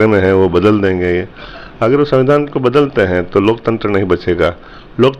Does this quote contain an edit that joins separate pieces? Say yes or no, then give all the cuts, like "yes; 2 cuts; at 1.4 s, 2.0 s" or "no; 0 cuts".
no; 0 cuts